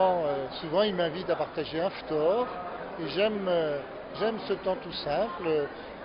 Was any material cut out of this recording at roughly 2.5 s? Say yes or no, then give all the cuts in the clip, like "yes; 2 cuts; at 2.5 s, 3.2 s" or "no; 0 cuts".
no; 0 cuts